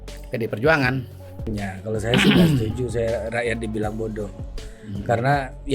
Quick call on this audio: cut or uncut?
cut